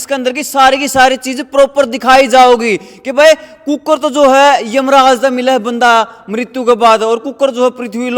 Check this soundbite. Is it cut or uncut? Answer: uncut